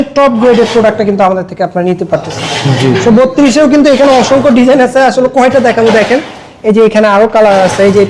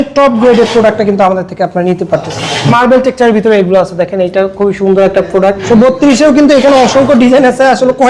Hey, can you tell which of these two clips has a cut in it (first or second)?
second